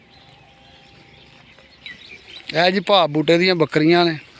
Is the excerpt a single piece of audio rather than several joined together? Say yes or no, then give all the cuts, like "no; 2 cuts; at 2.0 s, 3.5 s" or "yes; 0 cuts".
no; 1 cut; at 1.9 s